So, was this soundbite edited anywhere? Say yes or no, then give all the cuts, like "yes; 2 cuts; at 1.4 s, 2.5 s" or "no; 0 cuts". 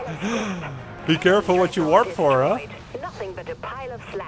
no; 0 cuts